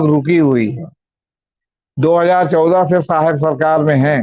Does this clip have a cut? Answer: no; 0 cuts

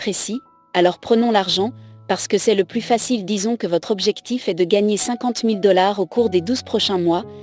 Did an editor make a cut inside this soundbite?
no; 0 cuts

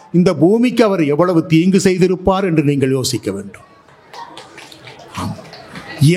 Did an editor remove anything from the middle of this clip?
no; 0 cuts

